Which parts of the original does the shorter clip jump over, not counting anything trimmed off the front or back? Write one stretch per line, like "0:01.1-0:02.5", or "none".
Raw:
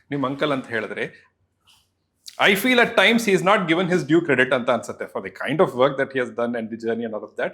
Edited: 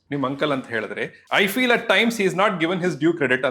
0:01.2-0:02.3